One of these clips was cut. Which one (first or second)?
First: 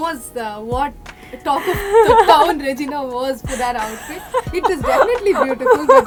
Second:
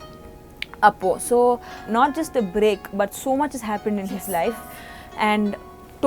second